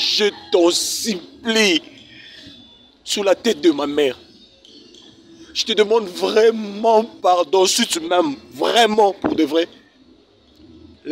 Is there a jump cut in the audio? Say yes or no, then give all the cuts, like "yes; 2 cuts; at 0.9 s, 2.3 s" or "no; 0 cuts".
no; 0 cuts